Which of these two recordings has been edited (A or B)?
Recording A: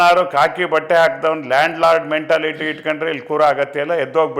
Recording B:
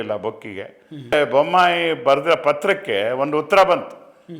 B